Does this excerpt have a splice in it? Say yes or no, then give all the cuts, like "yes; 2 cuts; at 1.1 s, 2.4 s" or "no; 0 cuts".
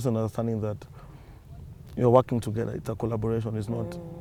no; 0 cuts